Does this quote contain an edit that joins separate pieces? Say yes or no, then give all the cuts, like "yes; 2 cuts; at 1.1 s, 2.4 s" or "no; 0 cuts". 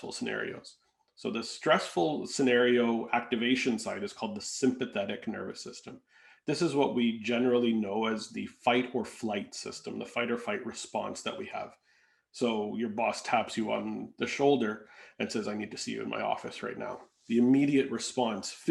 no; 0 cuts